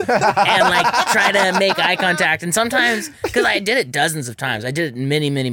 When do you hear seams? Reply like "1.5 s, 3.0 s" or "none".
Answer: none